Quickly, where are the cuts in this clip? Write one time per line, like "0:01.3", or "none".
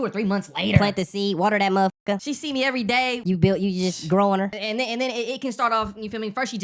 0:02.2
0:03.2
0:04.6